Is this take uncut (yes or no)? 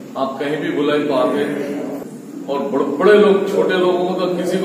no